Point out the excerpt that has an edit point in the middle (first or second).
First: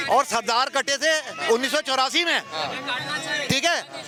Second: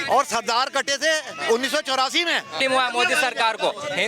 second